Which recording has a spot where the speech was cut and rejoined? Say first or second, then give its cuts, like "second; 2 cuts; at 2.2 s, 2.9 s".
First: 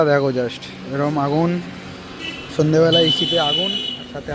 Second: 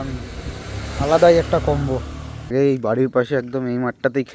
second; 1 cut; at 2.5 s